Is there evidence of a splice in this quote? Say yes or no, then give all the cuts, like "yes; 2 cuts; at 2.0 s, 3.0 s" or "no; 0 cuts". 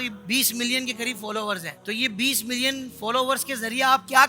yes; 1 cut; at 1.7 s